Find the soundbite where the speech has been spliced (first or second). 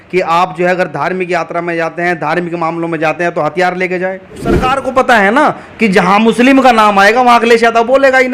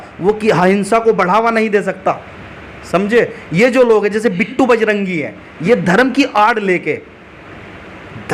first